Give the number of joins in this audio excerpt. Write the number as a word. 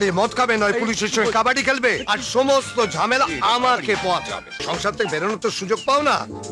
one